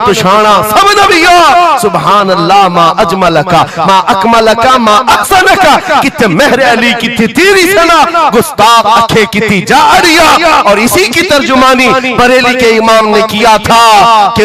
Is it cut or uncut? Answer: uncut